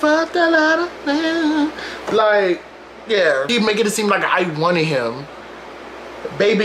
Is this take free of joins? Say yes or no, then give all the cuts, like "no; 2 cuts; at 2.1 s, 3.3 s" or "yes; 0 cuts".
no; 1 cut; at 3.5 s